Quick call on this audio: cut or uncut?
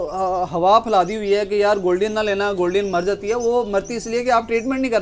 uncut